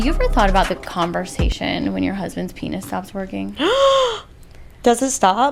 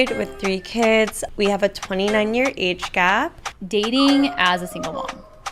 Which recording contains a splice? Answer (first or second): second